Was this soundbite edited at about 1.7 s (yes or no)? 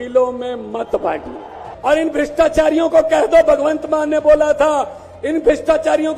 yes